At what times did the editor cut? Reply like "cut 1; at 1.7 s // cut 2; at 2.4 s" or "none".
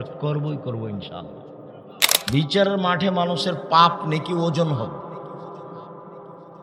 cut 1; at 2.1 s